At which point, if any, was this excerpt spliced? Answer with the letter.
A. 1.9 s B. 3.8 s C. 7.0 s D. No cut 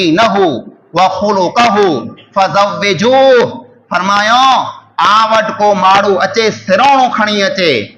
D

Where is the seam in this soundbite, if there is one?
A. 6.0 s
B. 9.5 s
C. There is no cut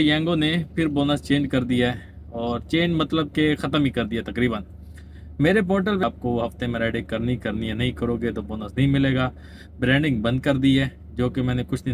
A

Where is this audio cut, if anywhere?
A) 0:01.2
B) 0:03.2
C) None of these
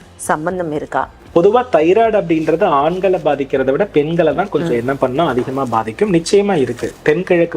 A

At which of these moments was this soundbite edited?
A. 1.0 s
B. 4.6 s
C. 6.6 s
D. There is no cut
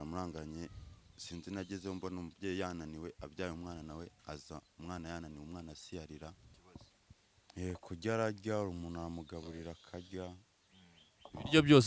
C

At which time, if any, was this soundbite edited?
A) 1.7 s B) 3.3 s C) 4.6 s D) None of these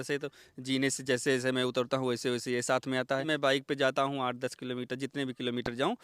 B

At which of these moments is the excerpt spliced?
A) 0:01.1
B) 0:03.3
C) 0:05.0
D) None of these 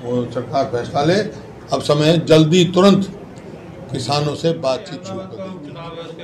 C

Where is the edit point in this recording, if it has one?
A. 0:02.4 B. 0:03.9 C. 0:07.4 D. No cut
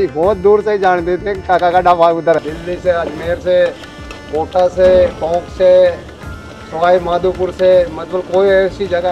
A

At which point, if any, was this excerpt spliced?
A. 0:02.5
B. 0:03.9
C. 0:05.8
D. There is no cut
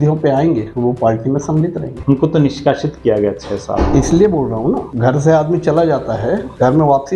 D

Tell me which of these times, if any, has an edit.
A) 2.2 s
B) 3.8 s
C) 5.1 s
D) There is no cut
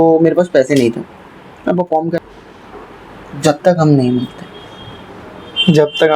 A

